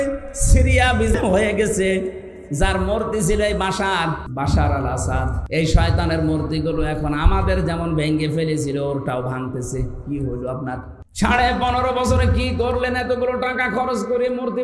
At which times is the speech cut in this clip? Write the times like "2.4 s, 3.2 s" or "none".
1.2 s, 4.3 s, 5.4 s, 11.0 s